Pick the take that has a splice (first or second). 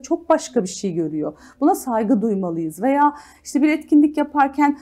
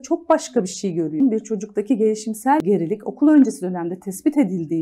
second